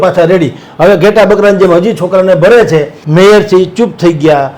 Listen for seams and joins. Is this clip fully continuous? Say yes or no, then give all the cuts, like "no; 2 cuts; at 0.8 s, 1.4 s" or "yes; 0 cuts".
no; 1 cut; at 3.0 s